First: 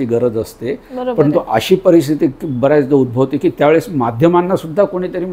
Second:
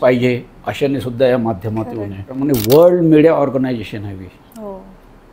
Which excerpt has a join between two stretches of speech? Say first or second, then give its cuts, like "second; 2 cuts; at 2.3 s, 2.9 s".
second; 1 cut; at 2.4 s